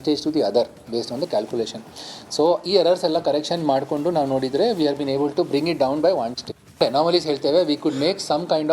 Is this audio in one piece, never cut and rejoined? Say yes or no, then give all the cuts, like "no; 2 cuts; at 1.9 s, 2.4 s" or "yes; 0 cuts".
no; 1 cut; at 6.8 s